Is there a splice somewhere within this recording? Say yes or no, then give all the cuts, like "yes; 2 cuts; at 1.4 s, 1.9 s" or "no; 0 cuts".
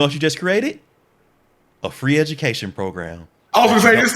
no; 0 cuts